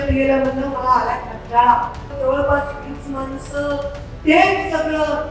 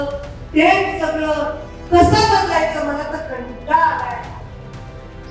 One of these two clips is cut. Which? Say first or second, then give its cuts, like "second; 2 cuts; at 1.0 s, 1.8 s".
first; 1 cut; at 2.0 s